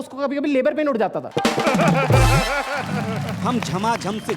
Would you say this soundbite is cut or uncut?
cut